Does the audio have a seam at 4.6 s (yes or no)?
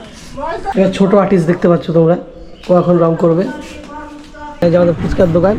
yes